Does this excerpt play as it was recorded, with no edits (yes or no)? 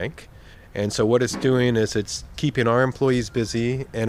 yes